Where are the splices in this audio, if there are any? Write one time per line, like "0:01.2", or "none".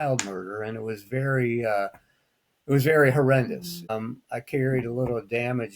0:03.9

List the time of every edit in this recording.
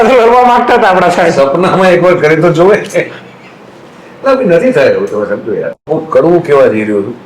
0:05.9

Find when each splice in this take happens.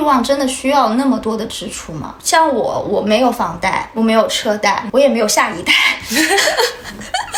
none

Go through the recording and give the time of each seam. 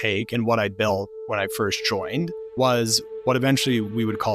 0:02.4

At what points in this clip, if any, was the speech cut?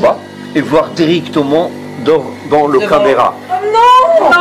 0:03.5

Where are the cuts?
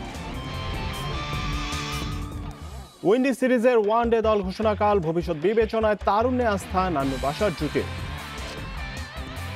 0:01.5

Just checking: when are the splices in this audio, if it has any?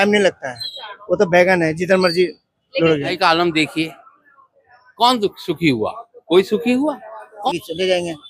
0:03.2
0:07.5

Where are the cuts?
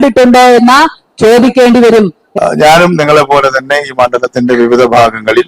0:02.2

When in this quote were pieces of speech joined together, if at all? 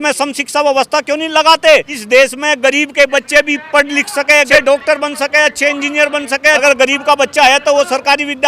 0:01.9
0:04.5
0:06.6

